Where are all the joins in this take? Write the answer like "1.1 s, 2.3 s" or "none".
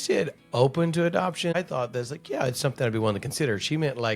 1.5 s